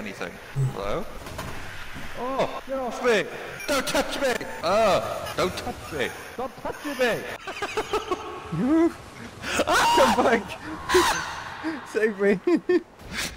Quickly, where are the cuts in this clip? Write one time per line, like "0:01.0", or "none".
0:01.3
0:02.6
0:07.3